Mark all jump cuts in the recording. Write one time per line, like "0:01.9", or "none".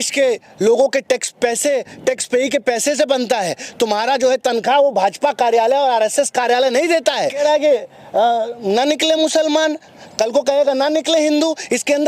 0:07.4